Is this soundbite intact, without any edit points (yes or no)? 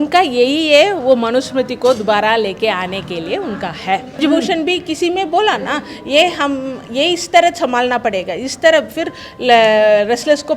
no